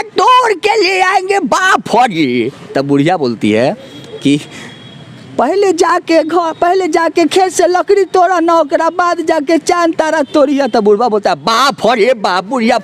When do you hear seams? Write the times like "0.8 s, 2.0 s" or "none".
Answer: none